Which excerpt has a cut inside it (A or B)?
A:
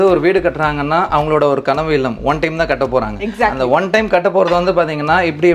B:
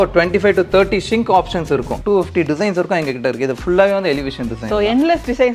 B